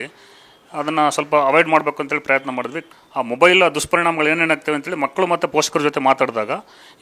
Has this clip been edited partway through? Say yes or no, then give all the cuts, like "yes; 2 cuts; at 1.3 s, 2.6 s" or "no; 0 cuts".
yes; 1 cut; at 2.8 s